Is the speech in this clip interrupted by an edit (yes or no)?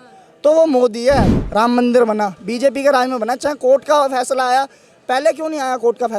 yes